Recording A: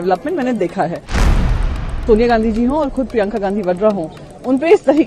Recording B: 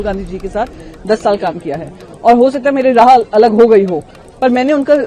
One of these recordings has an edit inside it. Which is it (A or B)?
A